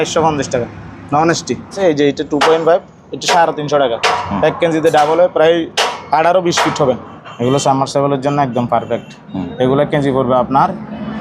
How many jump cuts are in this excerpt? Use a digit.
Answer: 2